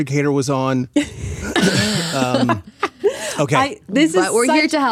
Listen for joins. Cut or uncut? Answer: uncut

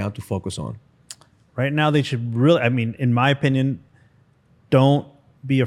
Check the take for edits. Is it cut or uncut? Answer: uncut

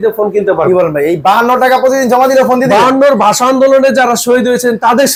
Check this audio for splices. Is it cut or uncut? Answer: uncut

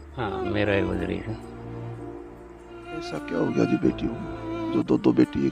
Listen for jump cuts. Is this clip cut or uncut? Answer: cut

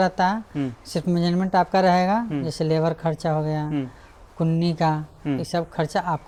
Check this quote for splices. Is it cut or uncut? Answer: uncut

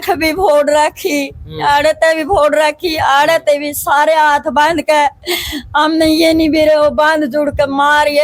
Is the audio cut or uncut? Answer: uncut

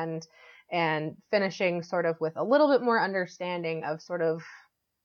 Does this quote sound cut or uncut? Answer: uncut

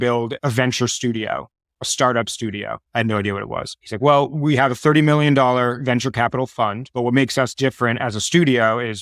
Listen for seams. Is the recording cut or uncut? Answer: uncut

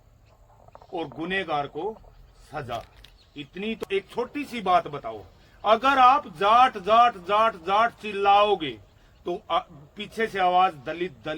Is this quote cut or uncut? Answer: cut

